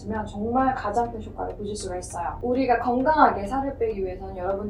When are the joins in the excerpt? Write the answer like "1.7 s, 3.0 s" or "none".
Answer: 2.4 s

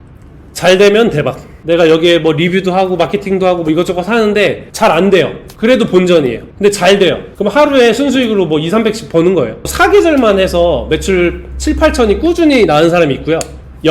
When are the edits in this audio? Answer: 1.5 s, 9.6 s

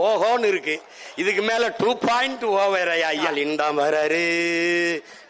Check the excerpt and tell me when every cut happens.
3.3 s

